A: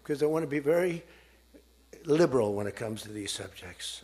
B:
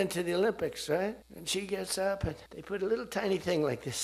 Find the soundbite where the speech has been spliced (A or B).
B